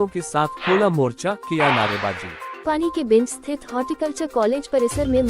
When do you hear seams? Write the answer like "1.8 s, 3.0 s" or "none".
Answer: 2.6 s